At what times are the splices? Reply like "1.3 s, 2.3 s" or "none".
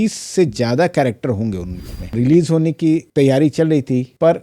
1.9 s